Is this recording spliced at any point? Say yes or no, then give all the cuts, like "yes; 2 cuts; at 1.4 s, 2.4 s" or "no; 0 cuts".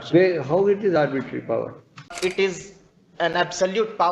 yes; 1 cut; at 2.1 s